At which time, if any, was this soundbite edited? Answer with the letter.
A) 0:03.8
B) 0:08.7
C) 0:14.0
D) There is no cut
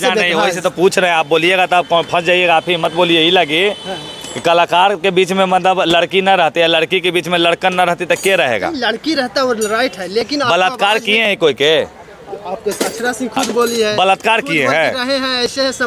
D